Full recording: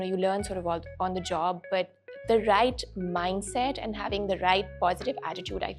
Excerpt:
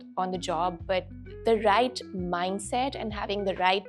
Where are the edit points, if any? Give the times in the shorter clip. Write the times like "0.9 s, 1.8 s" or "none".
none